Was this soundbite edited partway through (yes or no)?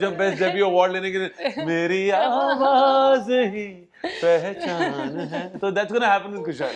no